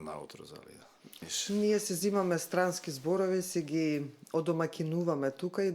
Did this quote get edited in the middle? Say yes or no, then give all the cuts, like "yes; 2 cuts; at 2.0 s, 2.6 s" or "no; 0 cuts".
yes; 1 cut; at 1.3 s